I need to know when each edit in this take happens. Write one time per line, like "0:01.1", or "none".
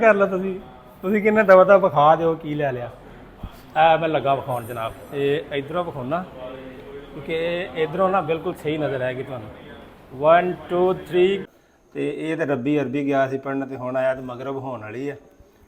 0:11.6